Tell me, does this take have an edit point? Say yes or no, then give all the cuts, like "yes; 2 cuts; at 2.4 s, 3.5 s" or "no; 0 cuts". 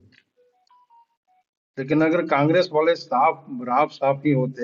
no; 0 cuts